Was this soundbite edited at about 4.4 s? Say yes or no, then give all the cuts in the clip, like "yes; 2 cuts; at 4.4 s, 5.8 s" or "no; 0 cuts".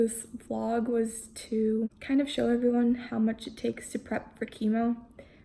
no; 1 cut; at 2.0 s